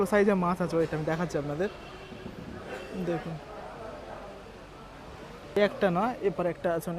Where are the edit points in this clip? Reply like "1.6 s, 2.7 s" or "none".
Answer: 5.6 s